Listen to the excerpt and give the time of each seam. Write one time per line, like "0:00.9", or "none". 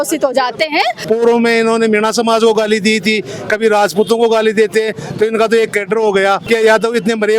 0:01.0
0:06.4